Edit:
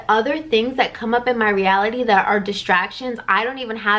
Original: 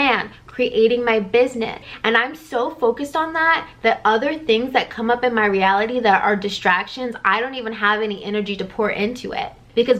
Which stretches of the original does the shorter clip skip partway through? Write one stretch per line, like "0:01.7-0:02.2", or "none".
none